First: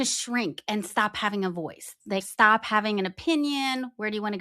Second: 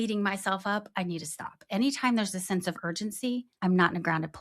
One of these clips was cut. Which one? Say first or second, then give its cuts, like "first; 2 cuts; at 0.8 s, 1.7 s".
second; 1 cut; at 3.5 s